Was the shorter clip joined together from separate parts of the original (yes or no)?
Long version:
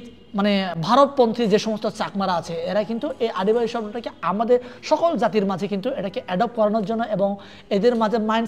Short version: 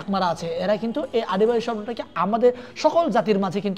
no